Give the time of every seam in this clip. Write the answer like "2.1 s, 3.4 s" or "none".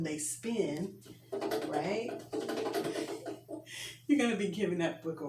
none